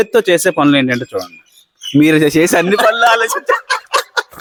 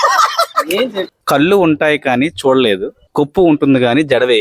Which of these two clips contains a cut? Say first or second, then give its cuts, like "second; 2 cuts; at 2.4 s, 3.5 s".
second; 2 cuts; at 1.1 s, 3.0 s